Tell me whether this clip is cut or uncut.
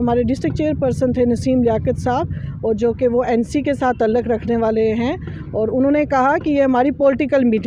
uncut